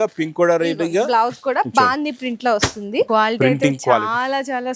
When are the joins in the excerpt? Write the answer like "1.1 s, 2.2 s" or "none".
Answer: 3.1 s